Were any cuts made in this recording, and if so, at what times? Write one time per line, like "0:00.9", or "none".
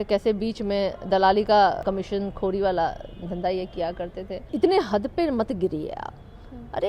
0:01.8
0:04.5